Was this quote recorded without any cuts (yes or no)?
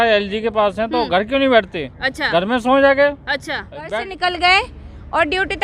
no